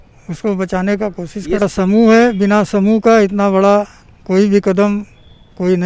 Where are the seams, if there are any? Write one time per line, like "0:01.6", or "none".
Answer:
0:01.6